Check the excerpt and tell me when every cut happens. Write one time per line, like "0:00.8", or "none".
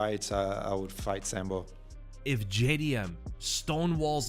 0:01.8